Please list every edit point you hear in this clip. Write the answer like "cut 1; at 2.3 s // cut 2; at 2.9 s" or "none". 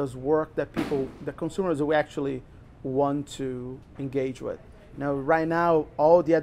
none